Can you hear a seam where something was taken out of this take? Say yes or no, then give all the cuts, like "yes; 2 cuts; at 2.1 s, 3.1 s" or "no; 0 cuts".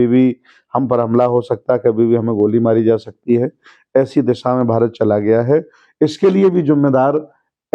no; 0 cuts